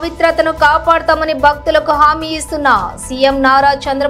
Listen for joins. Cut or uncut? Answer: uncut